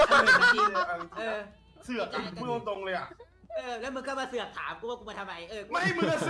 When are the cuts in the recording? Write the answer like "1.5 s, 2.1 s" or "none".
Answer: none